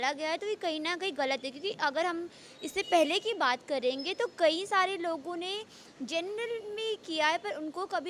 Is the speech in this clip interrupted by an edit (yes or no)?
no